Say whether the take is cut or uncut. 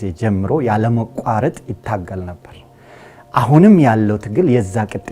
uncut